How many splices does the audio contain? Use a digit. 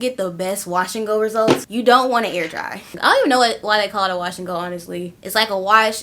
2